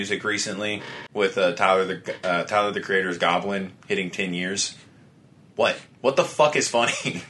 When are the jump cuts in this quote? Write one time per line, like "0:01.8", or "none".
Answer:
0:01.0